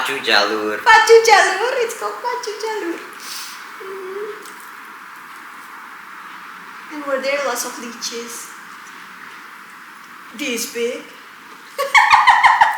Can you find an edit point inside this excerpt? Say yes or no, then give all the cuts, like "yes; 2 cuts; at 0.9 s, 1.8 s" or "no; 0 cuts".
no; 0 cuts